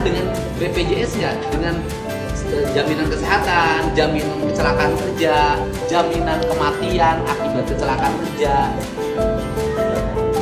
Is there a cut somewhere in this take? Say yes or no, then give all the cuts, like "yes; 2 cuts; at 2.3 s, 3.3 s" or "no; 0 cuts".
no; 0 cuts